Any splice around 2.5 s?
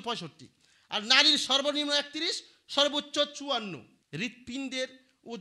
no; 1 cut; at 3.9 s

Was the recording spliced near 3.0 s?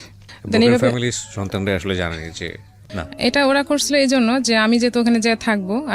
yes; 1 cut; at 3.0 s

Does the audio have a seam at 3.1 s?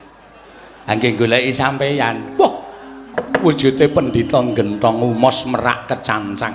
yes; 1 cut; at 3.1 s

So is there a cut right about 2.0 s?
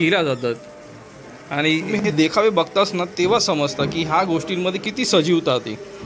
yes; 1 cut; at 2.0 s

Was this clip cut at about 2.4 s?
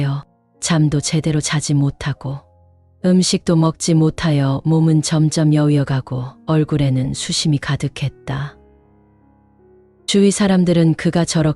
no; 2 cuts; at 8.5 s, 10.0 s

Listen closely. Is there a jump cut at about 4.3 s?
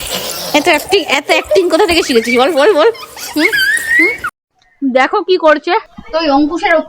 yes; 2 cuts; at 4.3 s, 6.0 s

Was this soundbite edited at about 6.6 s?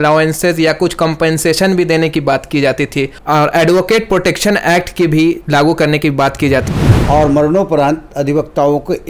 yes; 1 cut; at 6.6 s

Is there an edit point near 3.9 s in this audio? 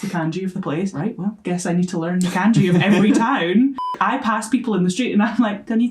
yes; 2 cuts; at 1.0 s, 3.9 s

